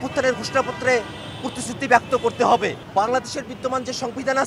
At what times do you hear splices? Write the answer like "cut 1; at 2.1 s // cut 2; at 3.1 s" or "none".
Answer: cut 1; at 2.8 s

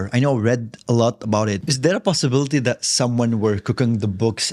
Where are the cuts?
cut 1; at 1.7 s

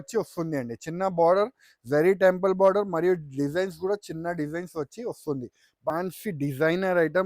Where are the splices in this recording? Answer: cut 1; at 5.9 s

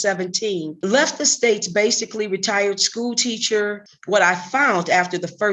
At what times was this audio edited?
cut 1; at 3.9 s

